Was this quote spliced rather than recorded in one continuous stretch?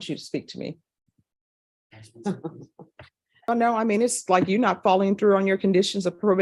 yes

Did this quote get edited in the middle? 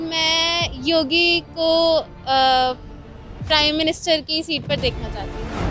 no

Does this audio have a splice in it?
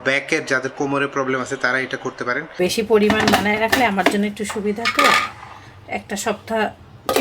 yes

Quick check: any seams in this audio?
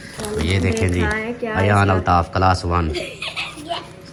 no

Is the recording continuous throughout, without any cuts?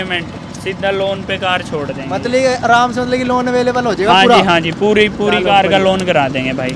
yes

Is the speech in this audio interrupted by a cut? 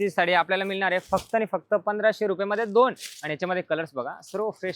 no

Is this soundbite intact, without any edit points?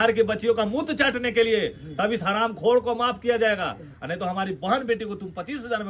yes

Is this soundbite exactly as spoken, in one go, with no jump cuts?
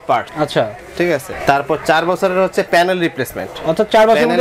yes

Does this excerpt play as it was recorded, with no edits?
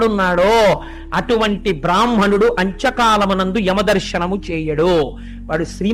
yes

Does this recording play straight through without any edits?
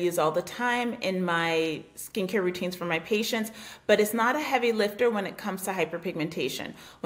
yes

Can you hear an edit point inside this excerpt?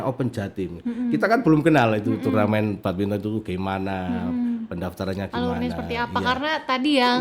no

